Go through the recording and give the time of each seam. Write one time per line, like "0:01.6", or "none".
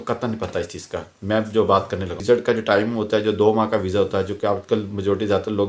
0:02.2